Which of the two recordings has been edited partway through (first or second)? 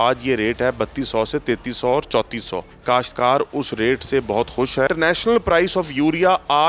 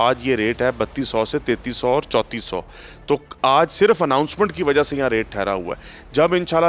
first